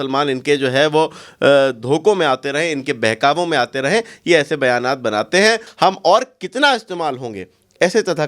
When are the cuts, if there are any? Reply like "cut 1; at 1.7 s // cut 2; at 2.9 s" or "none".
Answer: cut 1; at 5.7 s

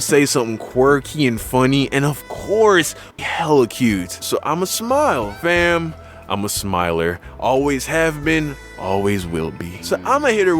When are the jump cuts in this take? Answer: cut 1; at 3.1 s

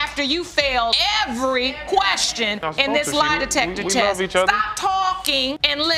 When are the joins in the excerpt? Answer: none

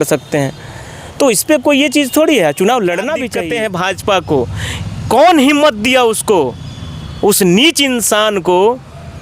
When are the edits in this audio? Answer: cut 1; at 3.3 s

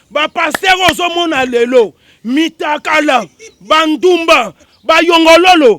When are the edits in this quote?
cut 1; at 4.7 s

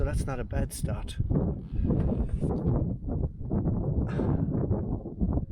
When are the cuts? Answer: cut 1; at 2.5 s

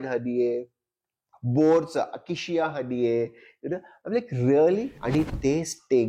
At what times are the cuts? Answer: cut 1; at 5.0 s

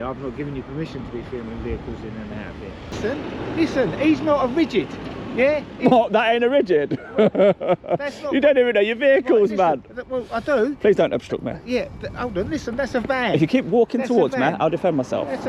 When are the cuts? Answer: cut 1; at 2.9 s

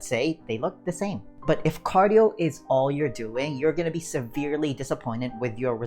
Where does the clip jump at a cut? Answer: cut 1; at 1.3 s

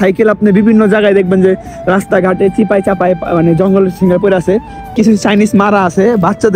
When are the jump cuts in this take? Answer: cut 1; at 4.8 s

